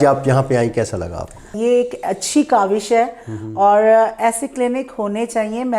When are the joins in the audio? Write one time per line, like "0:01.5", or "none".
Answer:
0:01.5